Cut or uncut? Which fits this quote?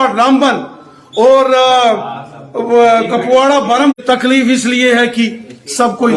cut